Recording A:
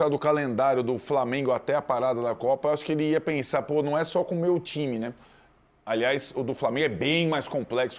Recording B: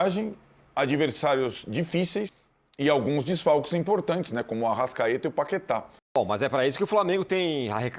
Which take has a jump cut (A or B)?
B